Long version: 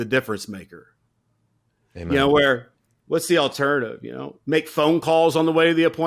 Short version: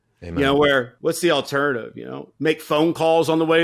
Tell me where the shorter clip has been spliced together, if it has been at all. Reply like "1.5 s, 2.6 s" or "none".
0.9 s